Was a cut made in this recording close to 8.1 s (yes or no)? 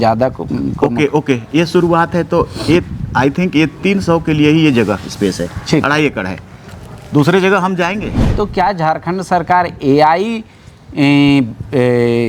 yes